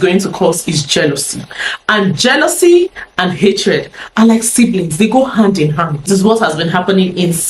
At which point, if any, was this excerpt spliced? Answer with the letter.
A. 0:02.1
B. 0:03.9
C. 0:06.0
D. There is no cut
C